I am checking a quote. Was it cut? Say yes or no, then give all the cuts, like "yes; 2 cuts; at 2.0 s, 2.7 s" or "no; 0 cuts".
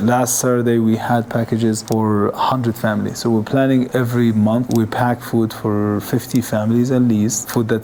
no; 0 cuts